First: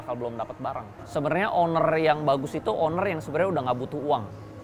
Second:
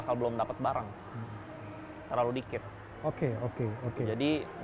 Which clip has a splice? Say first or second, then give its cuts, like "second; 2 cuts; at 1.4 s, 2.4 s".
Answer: first; 1 cut; at 0.9 s